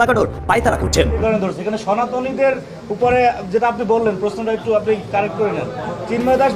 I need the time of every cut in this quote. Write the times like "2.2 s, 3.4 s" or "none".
1.2 s